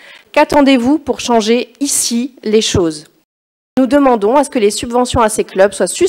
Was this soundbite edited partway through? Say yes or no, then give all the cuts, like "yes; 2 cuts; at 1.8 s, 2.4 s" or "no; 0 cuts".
yes; 1 cut; at 3.8 s